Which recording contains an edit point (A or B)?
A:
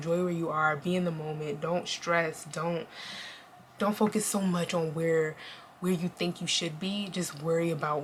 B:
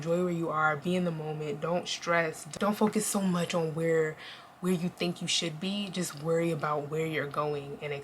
B